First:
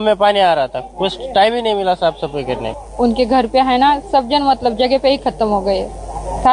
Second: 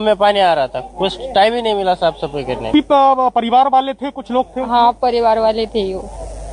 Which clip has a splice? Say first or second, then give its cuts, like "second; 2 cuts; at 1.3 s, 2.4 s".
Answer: first; 1 cut; at 2.7 s